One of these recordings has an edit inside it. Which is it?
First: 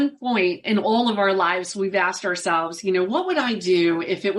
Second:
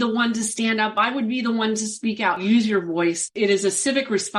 second; 2 cuts; at 2.4 s, 3.3 s

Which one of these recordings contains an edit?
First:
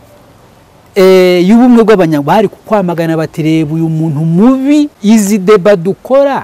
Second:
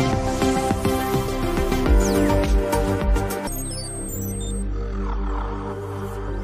first; 1 cut; at 4.9 s

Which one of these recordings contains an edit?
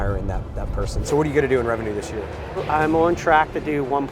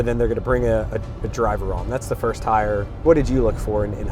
first; 2 cuts; at 0.9 s, 2.6 s

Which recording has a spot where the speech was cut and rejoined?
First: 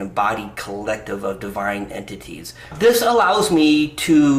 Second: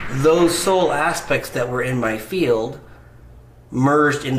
first; 1 cut; at 2.7 s

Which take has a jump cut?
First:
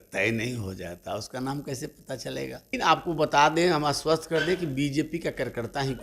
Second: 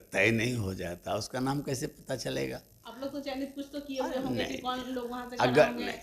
first; 1 cut; at 2.7 s

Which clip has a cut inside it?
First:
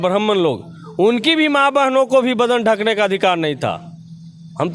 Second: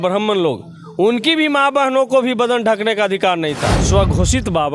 second; 1 cut; at 3.8 s

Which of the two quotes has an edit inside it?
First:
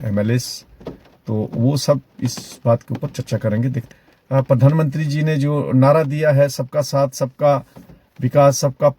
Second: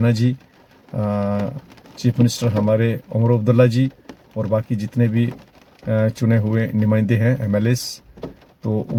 first; 1 cut; at 3.9 s

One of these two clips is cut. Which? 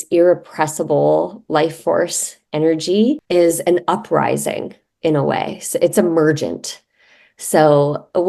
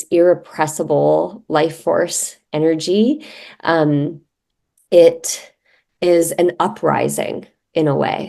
first; 1 cut; at 3.2 s

